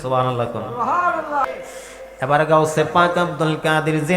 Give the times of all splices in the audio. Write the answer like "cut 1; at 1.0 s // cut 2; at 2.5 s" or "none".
cut 1; at 1.4 s